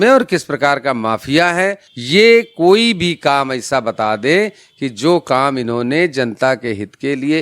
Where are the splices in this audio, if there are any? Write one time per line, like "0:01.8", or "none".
0:01.9